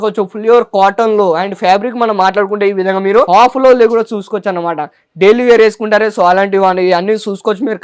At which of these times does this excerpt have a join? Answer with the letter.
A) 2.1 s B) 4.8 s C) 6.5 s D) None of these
D